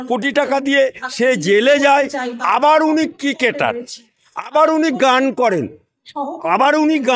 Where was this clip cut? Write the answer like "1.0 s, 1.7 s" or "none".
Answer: none